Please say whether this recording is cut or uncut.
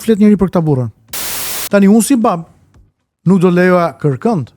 cut